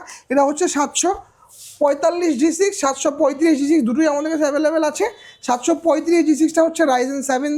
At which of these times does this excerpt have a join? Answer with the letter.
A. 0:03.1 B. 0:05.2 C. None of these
C